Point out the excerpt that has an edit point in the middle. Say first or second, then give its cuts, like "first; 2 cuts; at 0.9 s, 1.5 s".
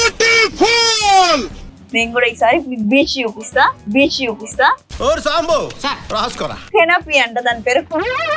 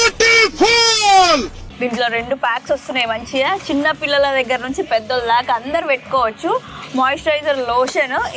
first; 2 cuts; at 1.7 s, 6.6 s